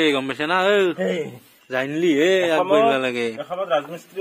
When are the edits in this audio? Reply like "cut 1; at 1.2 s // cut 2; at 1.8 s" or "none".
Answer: none